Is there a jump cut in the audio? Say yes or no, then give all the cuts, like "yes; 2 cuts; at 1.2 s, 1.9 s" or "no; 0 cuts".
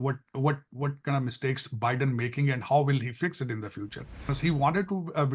yes; 1 cut; at 4.3 s